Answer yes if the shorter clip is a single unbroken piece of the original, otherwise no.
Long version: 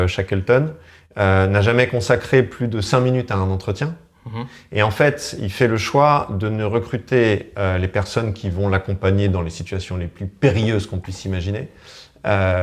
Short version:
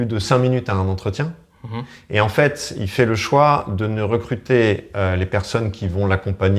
yes